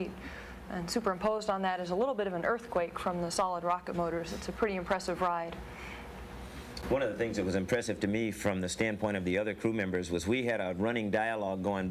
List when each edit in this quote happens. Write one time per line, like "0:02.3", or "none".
none

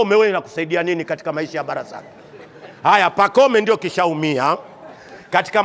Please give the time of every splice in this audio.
none

